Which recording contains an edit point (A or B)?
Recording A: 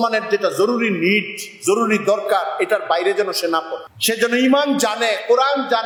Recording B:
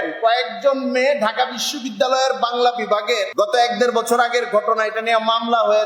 B